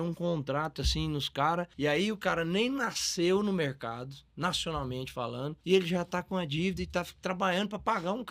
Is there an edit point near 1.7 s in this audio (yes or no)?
yes